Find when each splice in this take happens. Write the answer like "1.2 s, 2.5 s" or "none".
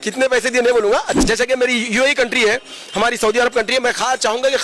1.1 s